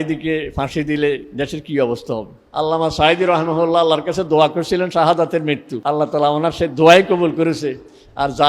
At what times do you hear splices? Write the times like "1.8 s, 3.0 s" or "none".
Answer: 2.4 s, 5.7 s